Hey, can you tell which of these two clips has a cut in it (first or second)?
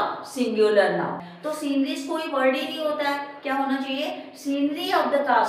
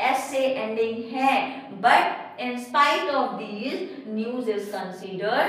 first